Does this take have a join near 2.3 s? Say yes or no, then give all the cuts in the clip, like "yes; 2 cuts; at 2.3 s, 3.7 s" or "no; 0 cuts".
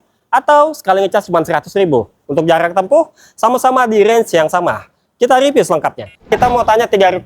no; 1 cut; at 6.3 s